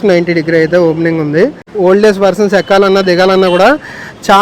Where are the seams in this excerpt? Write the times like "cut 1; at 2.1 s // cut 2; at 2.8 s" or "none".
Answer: cut 1; at 1.7 s